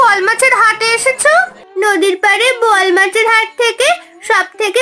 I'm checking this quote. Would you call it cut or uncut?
cut